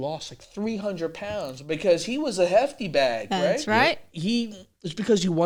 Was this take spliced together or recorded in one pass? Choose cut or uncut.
uncut